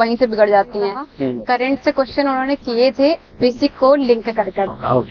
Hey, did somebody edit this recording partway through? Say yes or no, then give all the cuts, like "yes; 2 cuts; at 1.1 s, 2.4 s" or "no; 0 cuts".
yes; 1 cut; at 1.1 s